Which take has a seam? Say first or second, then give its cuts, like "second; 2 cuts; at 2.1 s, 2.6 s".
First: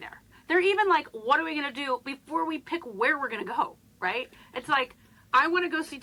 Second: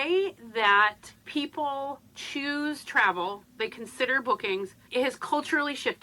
second; 3 cuts; at 1.1 s, 2.1 s, 4.8 s